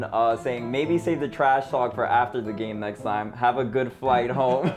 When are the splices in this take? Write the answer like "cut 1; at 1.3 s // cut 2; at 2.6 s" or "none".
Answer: none